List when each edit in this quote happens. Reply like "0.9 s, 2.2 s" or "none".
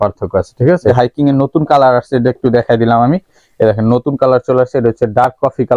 0.9 s